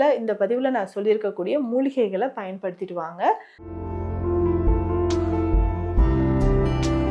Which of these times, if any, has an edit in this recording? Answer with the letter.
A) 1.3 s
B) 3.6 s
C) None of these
B